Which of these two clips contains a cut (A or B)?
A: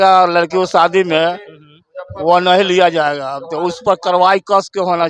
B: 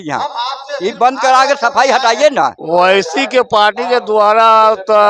B